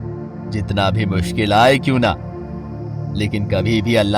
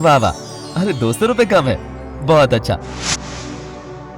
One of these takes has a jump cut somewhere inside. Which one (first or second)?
second